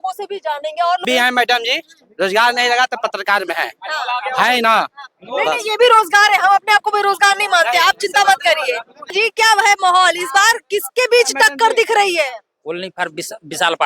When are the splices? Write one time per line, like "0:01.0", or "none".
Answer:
0:01.0
0:09.1